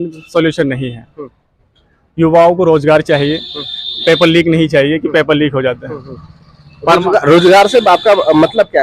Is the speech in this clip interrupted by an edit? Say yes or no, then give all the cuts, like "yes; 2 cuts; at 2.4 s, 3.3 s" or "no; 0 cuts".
no; 0 cuts